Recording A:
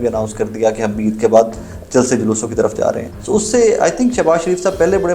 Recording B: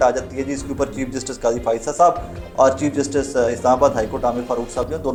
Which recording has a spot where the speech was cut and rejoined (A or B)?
A